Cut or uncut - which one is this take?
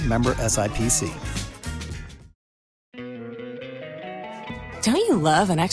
cut